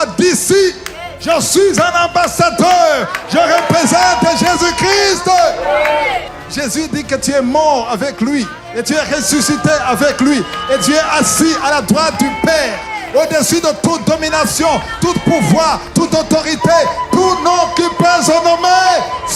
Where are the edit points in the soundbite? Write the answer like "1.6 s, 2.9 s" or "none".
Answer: 6.3 s